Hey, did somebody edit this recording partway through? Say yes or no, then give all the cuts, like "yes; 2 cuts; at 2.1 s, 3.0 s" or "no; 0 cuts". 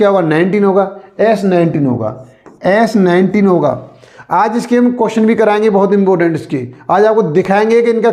no; 0 cuts